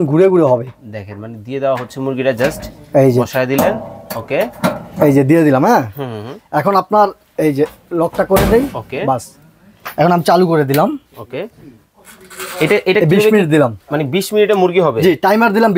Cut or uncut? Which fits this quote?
uncut